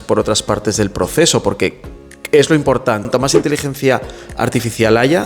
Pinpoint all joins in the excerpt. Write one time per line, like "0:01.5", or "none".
0:03.1